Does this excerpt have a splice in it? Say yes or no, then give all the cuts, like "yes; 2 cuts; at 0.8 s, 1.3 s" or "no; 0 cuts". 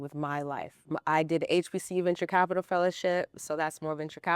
yes; 1 cut; at 1.0 s